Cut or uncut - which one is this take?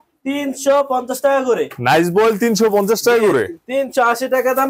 uncut